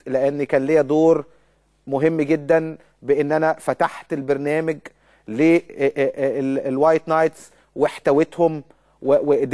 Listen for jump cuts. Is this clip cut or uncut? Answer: uncut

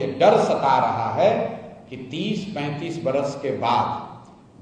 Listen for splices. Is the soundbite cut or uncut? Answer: uncut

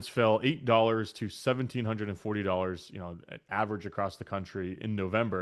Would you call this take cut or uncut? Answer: uncut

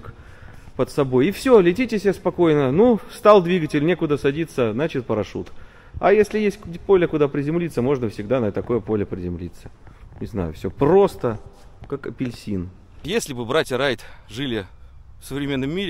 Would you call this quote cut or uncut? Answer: cut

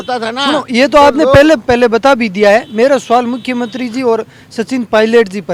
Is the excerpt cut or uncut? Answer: uncut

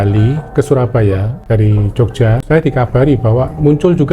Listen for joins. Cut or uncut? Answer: cut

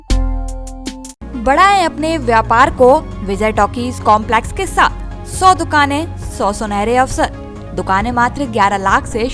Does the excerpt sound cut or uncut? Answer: uncut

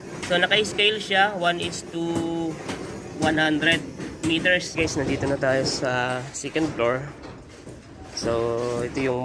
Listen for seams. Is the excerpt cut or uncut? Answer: cut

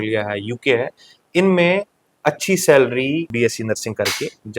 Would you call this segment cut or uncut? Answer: cut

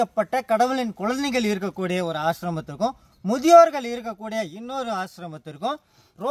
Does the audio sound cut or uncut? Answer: uncut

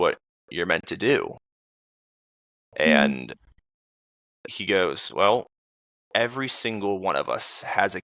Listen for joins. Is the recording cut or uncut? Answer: uncut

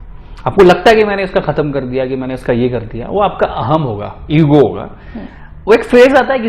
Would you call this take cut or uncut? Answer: uncut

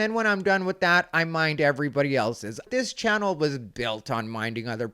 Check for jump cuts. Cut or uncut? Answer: cut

